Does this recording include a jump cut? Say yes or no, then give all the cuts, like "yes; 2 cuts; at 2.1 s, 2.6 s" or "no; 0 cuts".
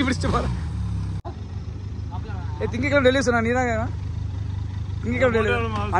yes; 1 cut; at 1.3 s